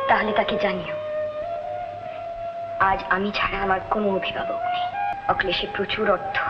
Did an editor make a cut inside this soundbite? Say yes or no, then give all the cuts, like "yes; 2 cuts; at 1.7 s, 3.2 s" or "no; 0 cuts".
yes; 1 cut; at 5.1 s